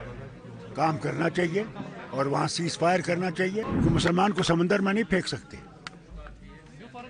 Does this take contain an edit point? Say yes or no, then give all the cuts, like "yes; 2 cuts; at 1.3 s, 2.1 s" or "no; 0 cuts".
yes; 1 cut; at 3.7 s